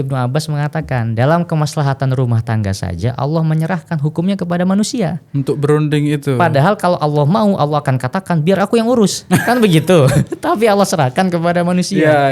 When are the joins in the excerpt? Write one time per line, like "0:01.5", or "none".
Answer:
none